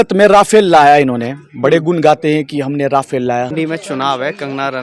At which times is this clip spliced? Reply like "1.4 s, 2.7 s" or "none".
3.5 s